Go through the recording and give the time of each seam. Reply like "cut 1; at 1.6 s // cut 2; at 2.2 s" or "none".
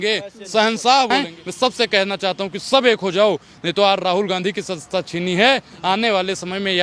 cut 1; at 1.1 s